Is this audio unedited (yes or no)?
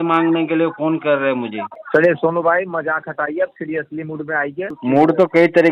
no